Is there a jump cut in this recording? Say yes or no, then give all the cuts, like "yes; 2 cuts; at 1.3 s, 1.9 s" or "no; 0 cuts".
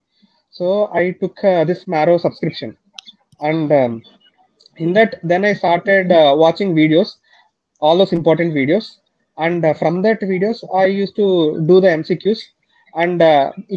no; 0 cuts